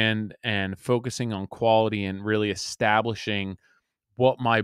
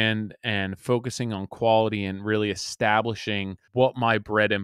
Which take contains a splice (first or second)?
second